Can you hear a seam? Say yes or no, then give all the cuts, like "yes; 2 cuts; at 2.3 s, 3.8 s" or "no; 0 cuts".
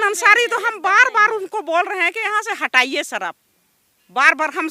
no; 0 cuts